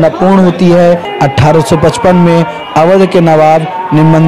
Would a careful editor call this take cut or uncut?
cut